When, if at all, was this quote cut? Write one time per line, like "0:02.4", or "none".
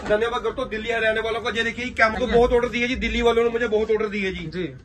0:02.2